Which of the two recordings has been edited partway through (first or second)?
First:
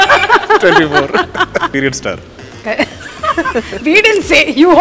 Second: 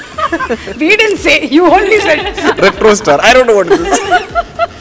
first